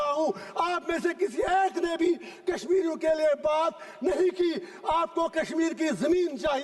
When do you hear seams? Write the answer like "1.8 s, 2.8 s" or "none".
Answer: none